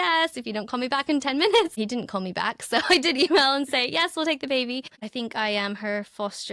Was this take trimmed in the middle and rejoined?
yes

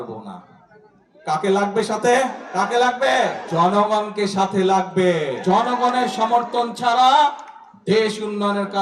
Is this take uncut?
no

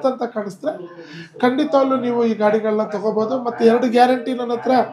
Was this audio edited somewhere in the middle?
no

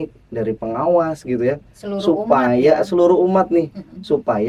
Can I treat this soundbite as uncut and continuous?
yes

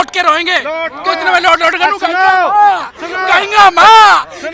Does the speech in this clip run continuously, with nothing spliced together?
yes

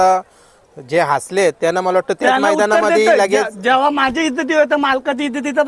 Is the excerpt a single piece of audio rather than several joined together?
yes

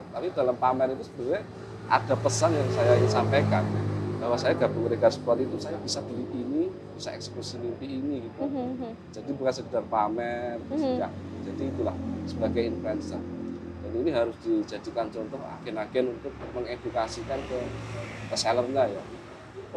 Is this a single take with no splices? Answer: yes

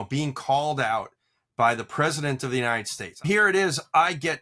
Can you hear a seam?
yes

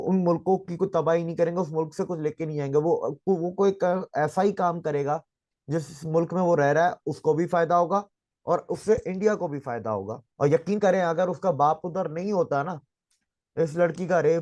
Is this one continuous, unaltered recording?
no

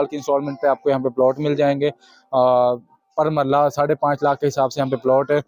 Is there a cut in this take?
no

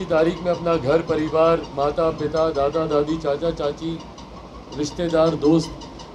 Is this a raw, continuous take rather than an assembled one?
yes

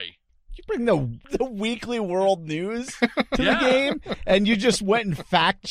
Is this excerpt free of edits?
no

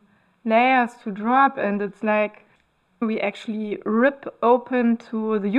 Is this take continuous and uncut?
no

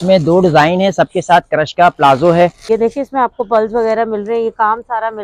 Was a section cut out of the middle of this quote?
yes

